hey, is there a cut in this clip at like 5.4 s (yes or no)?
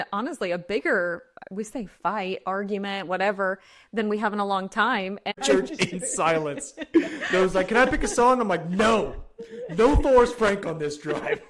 yes